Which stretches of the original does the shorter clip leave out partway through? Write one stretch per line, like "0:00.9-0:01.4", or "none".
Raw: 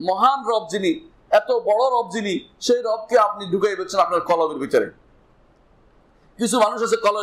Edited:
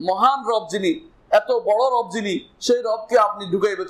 none